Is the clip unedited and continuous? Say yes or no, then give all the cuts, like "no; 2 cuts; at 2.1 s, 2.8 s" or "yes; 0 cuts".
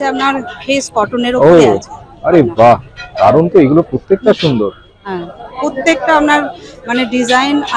yes; 0 cuts